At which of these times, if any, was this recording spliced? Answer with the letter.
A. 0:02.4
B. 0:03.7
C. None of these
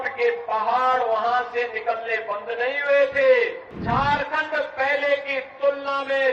B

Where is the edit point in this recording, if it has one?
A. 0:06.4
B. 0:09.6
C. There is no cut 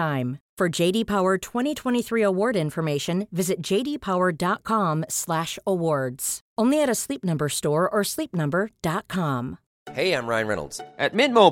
B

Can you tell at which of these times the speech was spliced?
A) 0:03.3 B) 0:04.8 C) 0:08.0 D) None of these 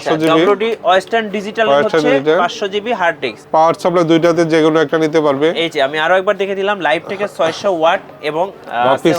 A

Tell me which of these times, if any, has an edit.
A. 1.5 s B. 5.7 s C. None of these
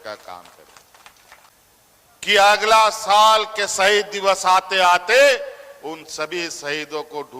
A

